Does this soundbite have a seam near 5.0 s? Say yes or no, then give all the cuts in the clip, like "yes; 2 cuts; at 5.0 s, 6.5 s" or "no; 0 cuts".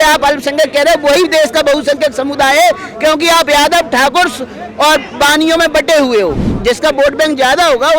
no; 1 cut; at 6.5 s